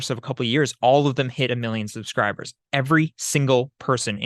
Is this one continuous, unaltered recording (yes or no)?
yes